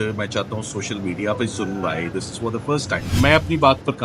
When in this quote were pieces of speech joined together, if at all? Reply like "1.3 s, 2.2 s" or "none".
3.1 s